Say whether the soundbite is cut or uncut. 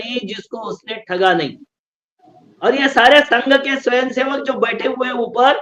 uncut